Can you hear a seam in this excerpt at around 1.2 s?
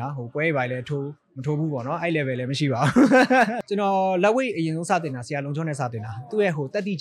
no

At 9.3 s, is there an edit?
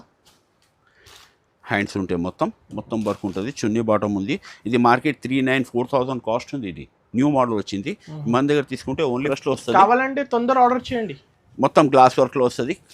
yes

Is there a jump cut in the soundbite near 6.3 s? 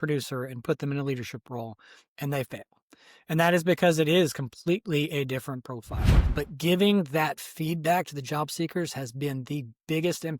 yes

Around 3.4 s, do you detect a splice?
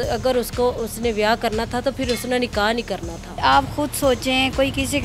yes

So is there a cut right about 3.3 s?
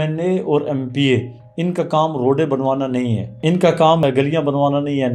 yes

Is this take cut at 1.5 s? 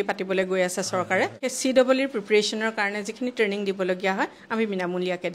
yes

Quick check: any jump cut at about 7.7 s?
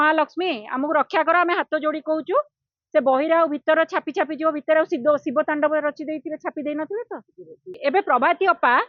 yes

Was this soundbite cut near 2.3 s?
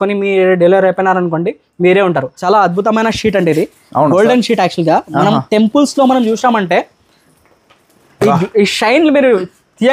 yes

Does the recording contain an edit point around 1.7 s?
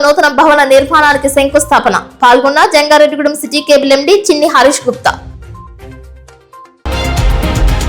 no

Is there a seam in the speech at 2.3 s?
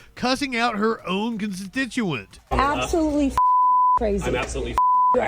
yes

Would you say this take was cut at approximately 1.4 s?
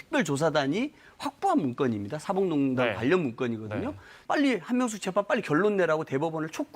no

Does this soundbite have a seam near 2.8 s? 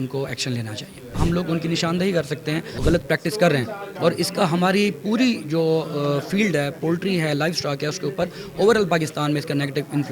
yes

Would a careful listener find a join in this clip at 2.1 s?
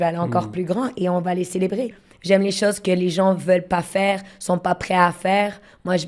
yes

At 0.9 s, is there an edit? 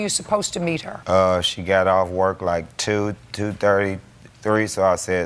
yes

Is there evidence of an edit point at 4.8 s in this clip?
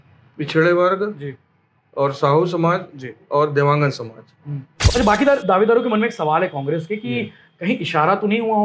yes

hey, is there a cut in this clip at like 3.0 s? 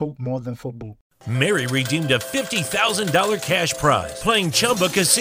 no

